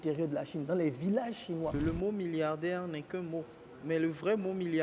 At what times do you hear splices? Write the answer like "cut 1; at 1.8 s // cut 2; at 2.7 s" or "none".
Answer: cut 1; at 1.8 s